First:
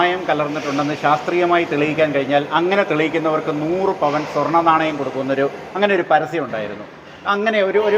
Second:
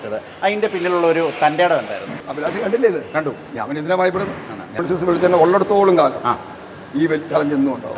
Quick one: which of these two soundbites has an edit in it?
second; 2 cuts; at 2.2 s, 4.8 s

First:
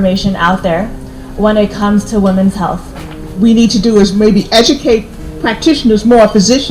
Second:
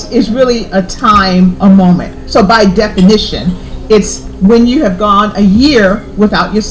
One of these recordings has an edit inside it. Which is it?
first; 1 cut; at 3.2 s

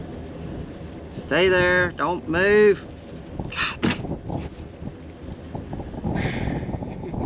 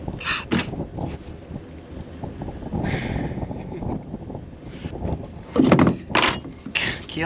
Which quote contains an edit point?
second; 1 cut; at 4.9 s

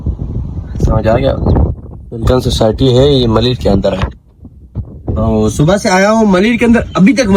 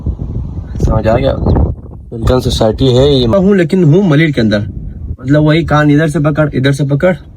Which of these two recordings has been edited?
second; 1 cut; at 3.3 s

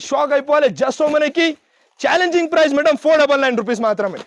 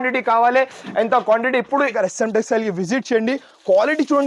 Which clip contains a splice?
second; 1 cut; at 1.9 s

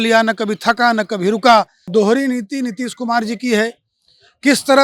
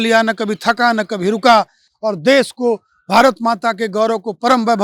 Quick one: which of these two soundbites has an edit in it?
first; 1 cut; at 1.9 s

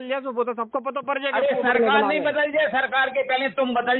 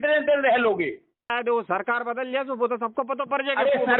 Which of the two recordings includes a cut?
second; 1 cut; at 1.3 s

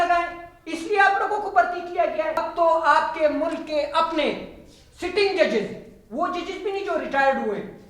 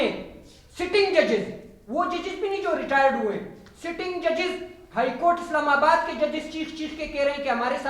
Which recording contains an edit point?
first; 1 cut; at 2.4 s

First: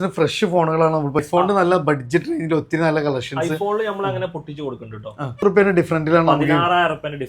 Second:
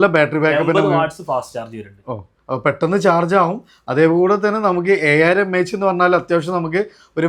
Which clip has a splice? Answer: first; 2 cuts; at 1.2 s, 5.3 s

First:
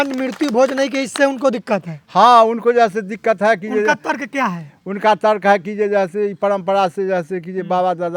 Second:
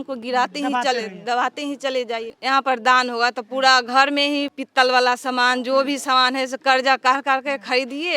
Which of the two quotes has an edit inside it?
second; 2 cuts; at 2.3 s, 4.5 s

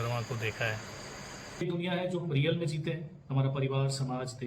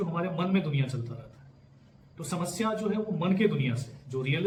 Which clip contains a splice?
first; 1 cut; at 1.6 s

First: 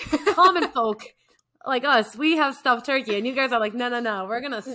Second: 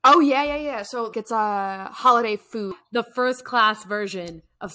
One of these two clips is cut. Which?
second; 2 cuts; at 1.2 s, 2.8 s

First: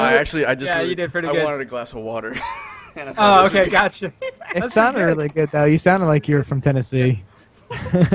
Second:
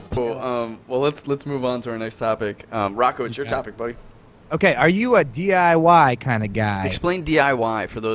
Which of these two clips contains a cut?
first; 1 cut; at 7.0 s

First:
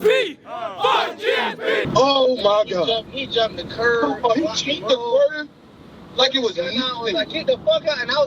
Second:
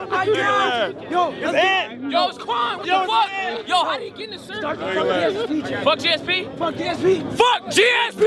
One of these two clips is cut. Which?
first; 1 cut; at 1.9 s

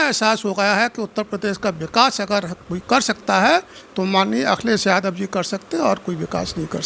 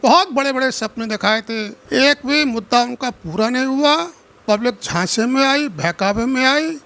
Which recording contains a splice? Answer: second; 1 cut; at 1.7 s

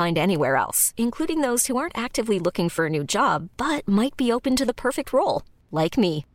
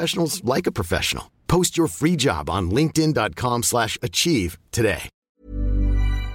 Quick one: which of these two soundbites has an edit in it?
second; 1 cut; at 5.1 s

